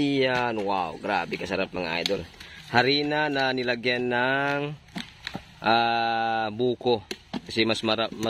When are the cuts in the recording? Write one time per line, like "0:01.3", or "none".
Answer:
none